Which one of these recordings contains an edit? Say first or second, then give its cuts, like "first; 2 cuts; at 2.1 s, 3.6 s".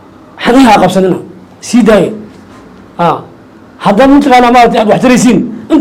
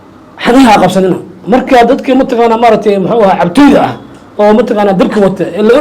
second; 1 cut; at 1.3 s